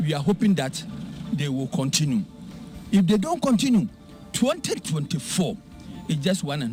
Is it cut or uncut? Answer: uncut